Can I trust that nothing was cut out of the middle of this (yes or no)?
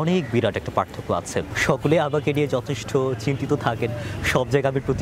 no